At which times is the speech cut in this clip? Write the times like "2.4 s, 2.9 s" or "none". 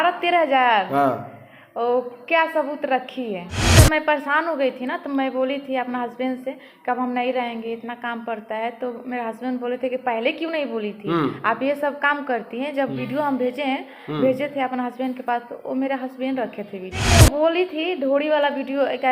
3.5 s, 17.1 s